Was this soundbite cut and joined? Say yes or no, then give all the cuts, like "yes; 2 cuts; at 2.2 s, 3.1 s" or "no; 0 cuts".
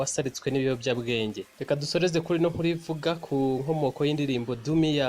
yes; 1 cut; at 1.5 s